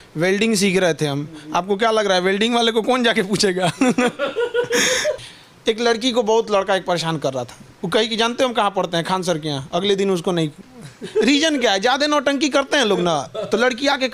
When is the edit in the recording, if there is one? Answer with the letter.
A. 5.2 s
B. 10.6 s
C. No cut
A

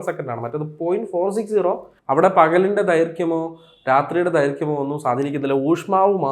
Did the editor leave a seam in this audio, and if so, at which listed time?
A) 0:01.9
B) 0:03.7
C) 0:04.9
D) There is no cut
A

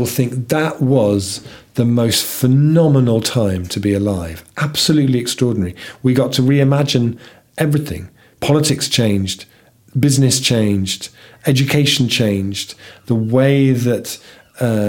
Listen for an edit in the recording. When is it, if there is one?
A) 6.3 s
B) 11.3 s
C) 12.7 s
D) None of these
D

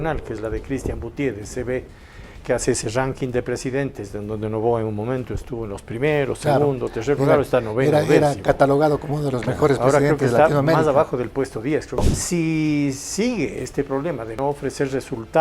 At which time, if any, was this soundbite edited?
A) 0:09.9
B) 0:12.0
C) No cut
B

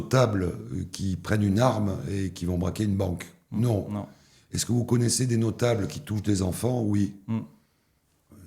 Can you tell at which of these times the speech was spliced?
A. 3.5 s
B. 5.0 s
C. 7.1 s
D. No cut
D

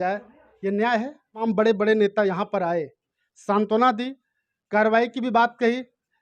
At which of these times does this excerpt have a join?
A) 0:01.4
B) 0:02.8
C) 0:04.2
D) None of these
A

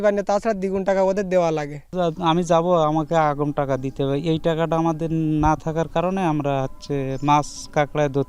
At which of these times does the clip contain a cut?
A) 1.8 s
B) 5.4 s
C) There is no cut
C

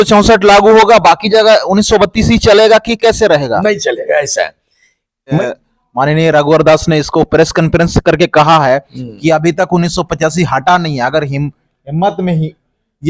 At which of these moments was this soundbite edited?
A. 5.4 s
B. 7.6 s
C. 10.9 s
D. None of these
A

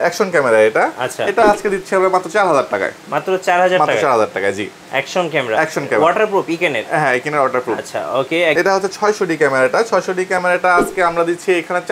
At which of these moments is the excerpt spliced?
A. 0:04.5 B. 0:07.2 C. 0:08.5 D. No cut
C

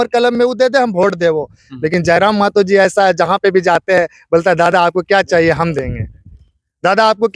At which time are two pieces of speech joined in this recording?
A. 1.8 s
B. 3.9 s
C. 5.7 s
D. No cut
D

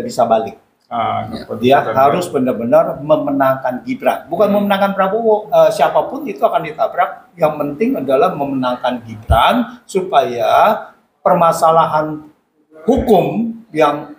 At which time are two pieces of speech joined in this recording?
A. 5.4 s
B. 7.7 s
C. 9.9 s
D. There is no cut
A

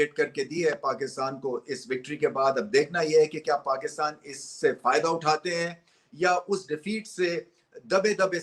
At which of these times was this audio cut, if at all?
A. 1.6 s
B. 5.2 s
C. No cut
C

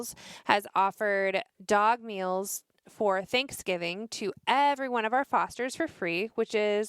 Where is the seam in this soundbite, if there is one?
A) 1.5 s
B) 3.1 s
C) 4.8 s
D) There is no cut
A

